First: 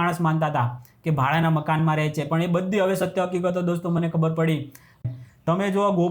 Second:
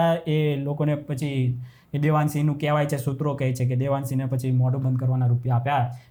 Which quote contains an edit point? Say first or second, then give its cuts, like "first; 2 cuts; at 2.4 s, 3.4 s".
first; 1 cut; at 5.0 s